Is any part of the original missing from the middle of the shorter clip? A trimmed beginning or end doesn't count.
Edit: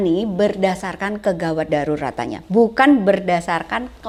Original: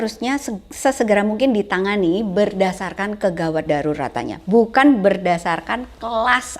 no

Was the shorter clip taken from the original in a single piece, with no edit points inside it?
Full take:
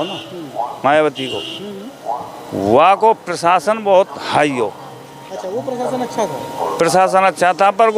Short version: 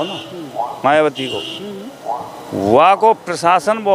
yes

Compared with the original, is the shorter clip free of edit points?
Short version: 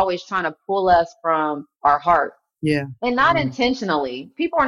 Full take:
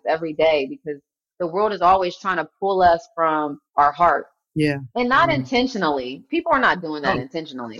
yes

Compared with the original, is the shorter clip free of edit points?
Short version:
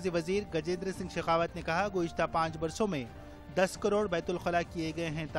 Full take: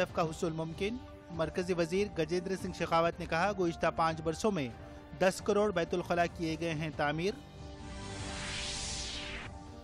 yes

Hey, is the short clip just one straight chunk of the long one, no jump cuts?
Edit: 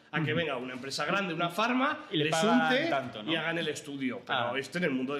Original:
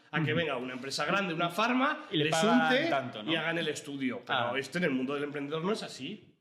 yes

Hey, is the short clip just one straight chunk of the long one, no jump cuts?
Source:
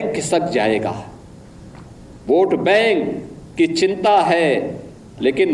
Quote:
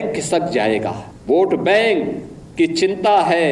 no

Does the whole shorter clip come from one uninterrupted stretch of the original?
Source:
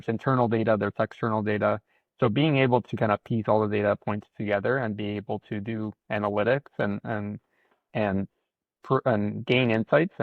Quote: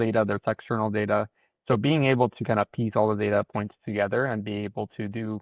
yes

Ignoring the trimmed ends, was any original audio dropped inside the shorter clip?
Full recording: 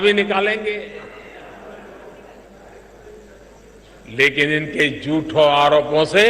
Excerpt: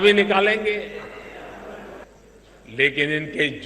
yes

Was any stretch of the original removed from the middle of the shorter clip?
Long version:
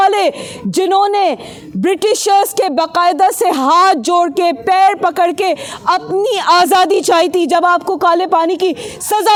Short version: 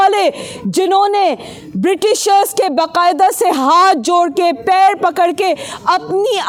no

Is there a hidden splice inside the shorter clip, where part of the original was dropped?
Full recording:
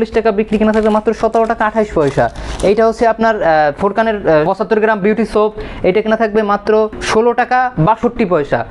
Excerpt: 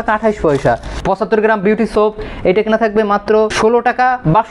yes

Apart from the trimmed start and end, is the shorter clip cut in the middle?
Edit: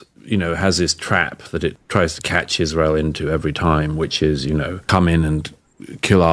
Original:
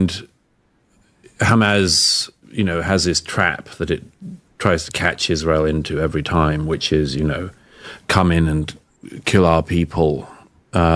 yes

